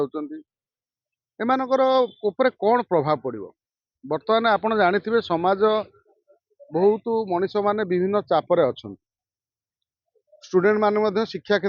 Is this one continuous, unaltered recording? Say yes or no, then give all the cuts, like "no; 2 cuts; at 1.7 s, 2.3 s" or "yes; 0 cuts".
yes; 0 cuts